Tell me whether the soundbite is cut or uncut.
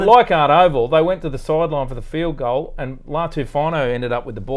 uncut